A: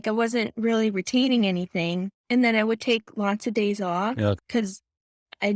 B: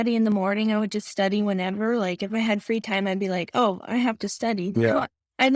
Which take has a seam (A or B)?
A